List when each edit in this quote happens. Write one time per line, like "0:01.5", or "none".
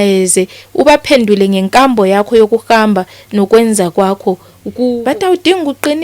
0:04.9

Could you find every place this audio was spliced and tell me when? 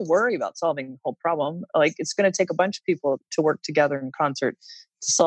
0:03.2

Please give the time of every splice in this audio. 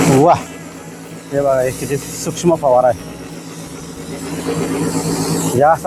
none

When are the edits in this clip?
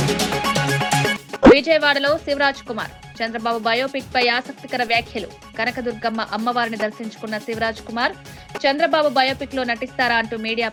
none

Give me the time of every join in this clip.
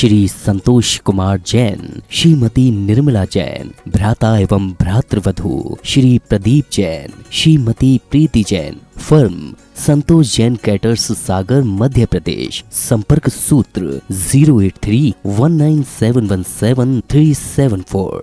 none

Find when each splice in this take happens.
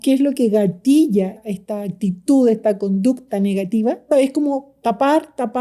0:01.4
0:04.1

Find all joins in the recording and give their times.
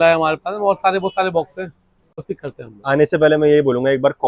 0:02.2

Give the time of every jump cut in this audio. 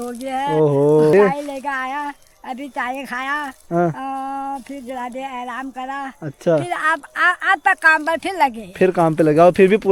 0:01.1

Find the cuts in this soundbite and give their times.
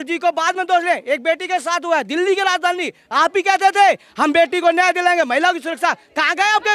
0:03.1

